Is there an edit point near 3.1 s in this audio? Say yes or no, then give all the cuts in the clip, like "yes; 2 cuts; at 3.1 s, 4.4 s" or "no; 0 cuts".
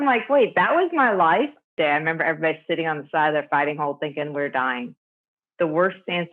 no; 1 cut; at 1.7 s